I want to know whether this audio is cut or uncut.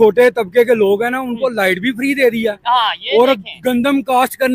uncut